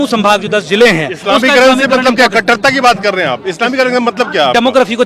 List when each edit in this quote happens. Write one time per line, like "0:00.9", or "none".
none